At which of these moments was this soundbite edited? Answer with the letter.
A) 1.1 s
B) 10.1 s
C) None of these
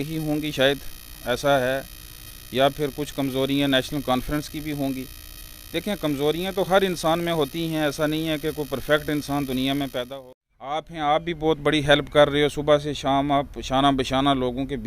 B